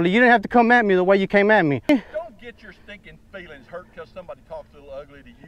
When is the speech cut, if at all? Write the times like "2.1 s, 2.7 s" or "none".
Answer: 1.9 s